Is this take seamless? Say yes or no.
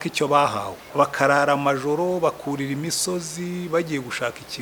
no